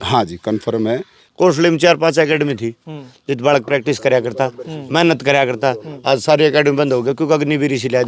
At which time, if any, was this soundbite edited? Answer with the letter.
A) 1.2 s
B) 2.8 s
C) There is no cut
A